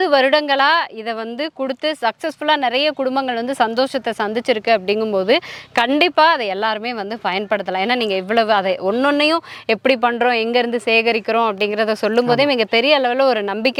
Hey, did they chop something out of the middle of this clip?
no; 0 cuts

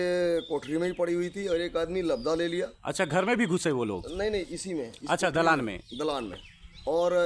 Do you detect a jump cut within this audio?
no; 0 cuts

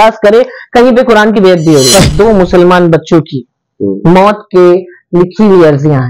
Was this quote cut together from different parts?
yes; 1 cut; at 1.9 s

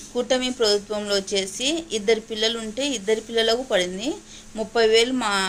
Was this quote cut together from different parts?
no; 0 cuts

